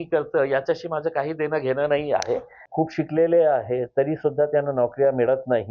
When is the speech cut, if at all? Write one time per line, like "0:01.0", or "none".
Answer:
0:02.6

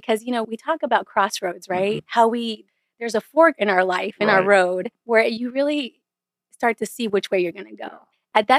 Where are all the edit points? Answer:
0:02.0
0:04.9

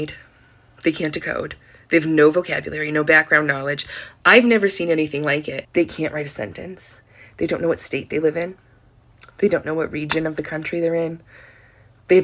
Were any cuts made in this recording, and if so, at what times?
0:05.6
0:10.7

